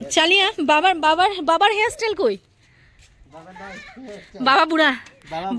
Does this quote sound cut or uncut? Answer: uncut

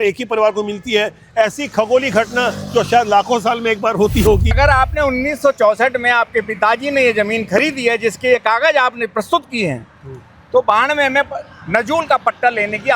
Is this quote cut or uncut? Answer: cut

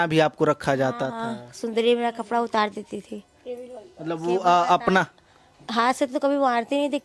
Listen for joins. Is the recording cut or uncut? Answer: uncut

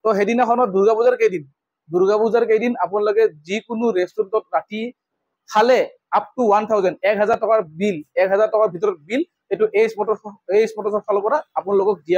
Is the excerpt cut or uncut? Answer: uncut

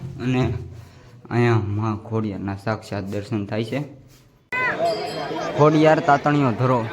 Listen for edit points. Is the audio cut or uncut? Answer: cut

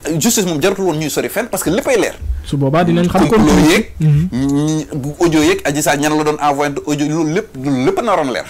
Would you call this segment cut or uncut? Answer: uncut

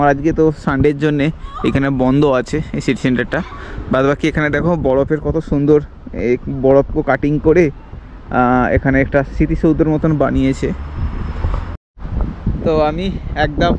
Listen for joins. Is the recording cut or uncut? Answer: cut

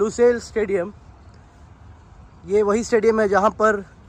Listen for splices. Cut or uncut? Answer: uncut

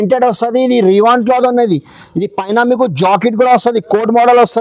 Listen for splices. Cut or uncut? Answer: uncut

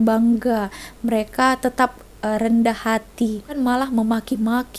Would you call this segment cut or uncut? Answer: cut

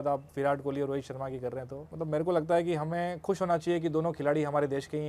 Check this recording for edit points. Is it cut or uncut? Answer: cut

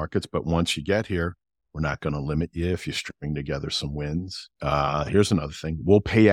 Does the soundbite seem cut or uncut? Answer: uncut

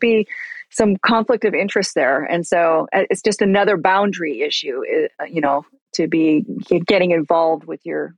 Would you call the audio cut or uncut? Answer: uncut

